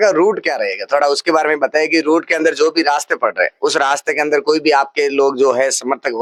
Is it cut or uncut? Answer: uncut